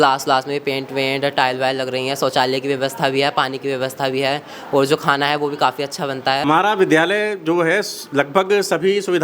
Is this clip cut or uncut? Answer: cut